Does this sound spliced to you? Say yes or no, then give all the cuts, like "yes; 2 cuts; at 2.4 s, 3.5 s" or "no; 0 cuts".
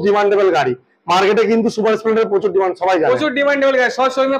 no; 0 cuts